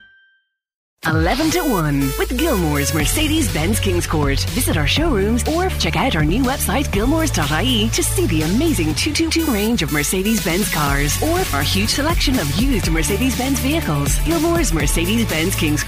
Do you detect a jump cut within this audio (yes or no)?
yes